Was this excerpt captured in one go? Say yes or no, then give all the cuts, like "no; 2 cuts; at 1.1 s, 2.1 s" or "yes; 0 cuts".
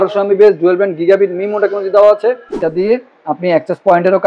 no; 1 cut; at 2.5 s